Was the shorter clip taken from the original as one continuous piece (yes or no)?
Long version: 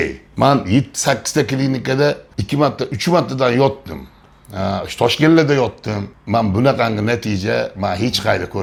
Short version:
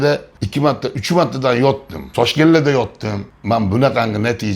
no